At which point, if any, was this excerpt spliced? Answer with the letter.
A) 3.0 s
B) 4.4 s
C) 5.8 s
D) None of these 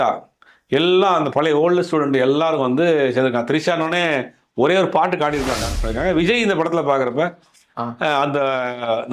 C